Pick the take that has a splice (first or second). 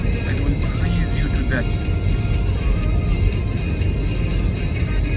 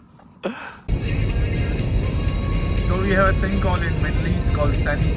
second